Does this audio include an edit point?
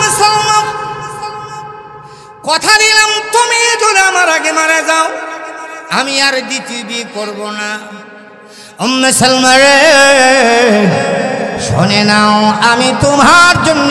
no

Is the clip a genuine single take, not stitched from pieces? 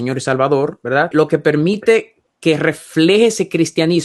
no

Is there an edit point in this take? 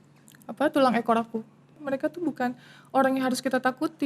yes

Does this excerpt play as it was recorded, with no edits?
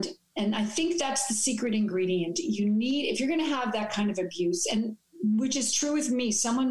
yes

